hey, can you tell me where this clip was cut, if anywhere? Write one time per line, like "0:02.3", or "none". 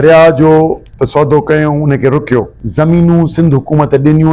0:00.9
0:02.6